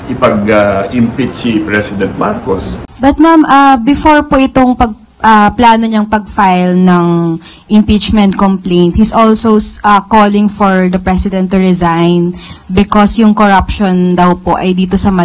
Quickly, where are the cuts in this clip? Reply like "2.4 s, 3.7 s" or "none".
2.8 s